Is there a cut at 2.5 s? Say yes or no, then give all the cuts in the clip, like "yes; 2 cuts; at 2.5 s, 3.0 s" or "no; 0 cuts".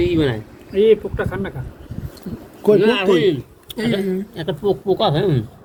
no; 0 cuts